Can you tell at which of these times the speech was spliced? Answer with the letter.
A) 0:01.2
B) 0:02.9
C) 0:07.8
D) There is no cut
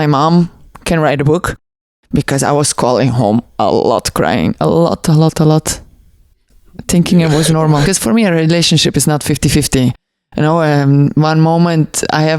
C